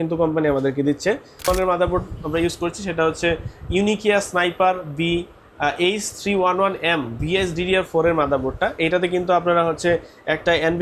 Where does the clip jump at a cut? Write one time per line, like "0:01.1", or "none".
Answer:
0:01.5